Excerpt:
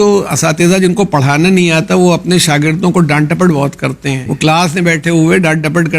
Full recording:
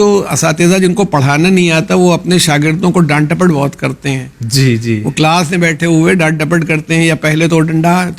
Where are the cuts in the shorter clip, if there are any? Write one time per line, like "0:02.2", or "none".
0:04.3